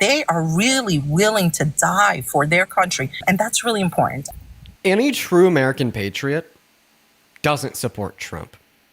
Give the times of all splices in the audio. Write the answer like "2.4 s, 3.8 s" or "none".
3.2 s, 4.2 s